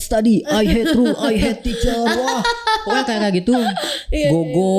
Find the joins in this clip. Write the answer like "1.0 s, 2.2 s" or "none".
none